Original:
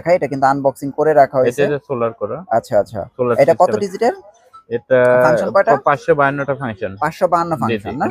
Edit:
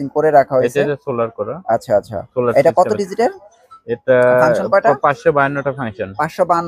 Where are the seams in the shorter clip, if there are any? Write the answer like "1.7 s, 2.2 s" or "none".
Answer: none